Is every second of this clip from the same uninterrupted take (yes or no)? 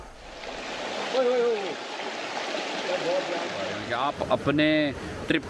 no